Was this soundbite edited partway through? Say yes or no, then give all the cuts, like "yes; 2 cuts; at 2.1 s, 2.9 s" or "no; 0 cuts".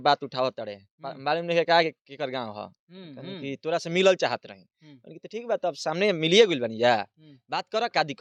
no; 0 cuts